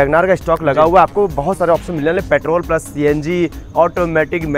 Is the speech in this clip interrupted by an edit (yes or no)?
no